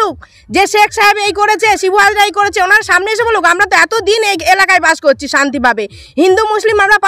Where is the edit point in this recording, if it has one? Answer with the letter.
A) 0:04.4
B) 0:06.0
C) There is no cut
C